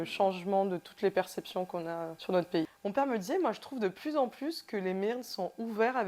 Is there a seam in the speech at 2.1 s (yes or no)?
yes